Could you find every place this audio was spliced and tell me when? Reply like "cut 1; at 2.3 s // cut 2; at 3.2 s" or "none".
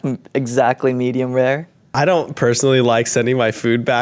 cut 1; at 1.9 s